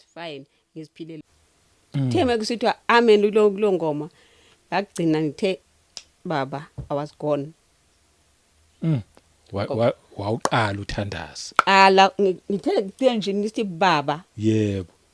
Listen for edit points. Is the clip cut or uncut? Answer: cut